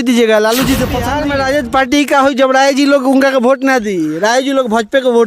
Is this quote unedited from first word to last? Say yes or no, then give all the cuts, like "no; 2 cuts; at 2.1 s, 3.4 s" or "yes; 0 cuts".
no; 1 cut; at 1.0 s